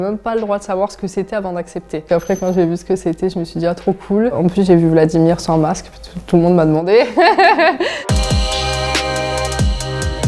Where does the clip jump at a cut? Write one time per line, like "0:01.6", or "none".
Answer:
0:02.0
0:04.3
0:08.1